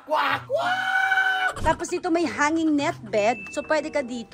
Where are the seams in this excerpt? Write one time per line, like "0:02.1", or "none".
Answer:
0:01.5